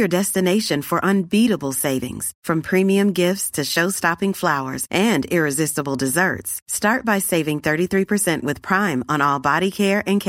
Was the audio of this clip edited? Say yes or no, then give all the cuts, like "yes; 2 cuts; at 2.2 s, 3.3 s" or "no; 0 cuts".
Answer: no; 0 cuts